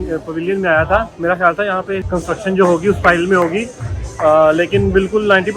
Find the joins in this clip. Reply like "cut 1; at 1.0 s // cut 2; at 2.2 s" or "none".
cut 1; at 2.0 s